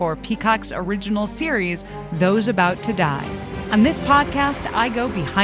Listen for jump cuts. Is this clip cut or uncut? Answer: cut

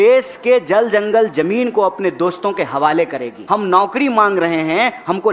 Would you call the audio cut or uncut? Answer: cut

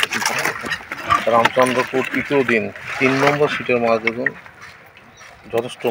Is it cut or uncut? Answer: uncut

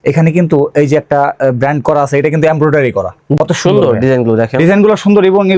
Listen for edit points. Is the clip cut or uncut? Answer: cut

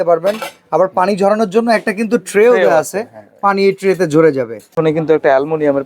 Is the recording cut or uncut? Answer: cut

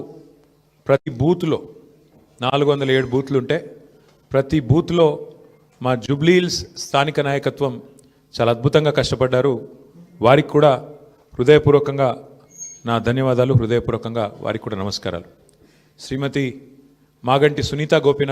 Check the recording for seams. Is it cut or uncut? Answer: cut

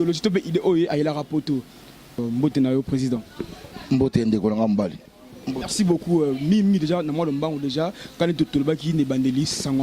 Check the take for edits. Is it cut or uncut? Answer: cut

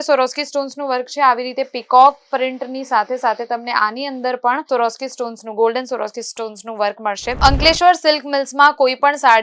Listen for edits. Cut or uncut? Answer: cut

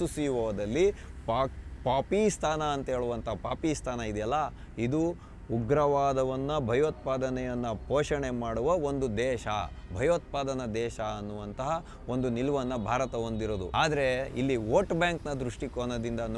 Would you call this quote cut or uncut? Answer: cut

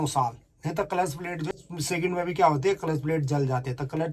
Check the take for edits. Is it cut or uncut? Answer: cut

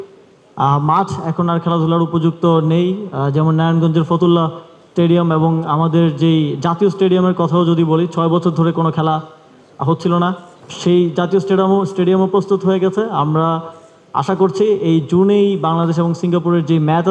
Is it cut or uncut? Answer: uncut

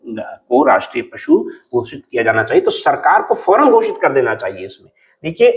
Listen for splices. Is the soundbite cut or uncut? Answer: uncut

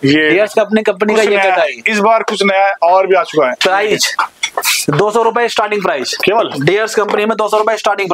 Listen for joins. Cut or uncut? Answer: uncut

